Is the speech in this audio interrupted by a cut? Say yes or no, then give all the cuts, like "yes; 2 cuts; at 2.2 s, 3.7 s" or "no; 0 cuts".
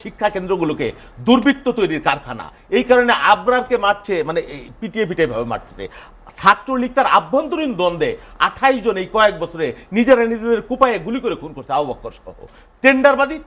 no; 0 cuts